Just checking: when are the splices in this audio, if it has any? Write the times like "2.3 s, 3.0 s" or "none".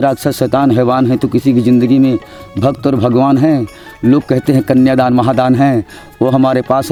none